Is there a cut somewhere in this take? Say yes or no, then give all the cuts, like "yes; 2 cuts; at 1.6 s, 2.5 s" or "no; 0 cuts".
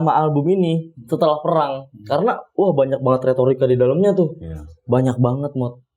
no; 0 cuts